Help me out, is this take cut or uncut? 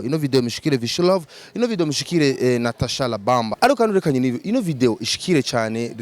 cut